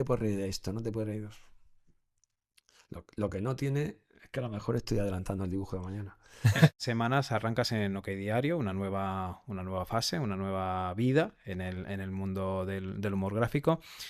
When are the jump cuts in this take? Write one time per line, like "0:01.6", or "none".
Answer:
0:06.8